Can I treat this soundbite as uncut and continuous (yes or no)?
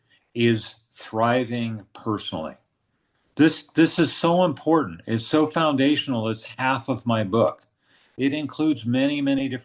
yes